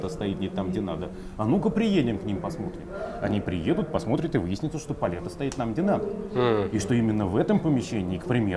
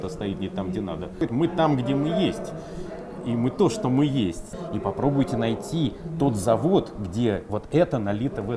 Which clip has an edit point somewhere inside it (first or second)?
second